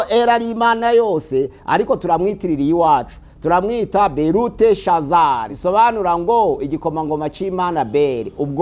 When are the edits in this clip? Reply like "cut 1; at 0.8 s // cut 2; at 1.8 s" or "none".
cut 1; at 5.5 s